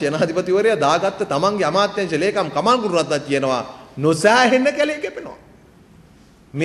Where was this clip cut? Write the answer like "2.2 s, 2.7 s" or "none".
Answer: none